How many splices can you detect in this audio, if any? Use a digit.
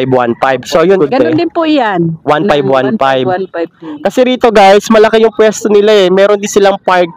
1